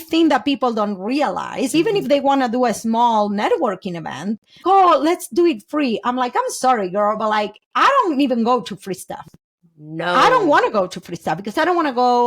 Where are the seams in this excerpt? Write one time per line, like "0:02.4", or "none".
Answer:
0:01.7
0:04.6

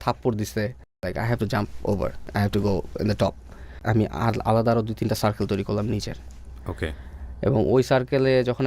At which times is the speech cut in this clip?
0:01.0
0:02.2
0:03.8

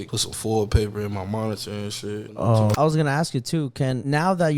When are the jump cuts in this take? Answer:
0:02.8

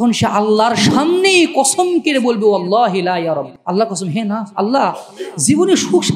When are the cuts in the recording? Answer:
0:03.5

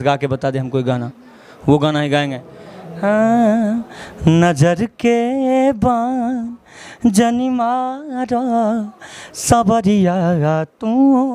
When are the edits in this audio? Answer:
none

